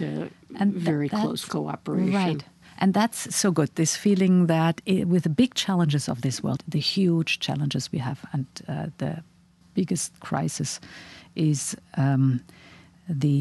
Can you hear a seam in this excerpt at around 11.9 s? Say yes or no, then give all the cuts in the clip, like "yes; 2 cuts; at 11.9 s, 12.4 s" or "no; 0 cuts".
no; 1 cut; at 6.6 s